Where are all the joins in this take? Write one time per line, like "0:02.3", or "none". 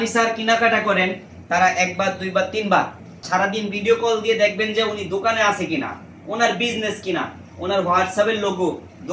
0:03.2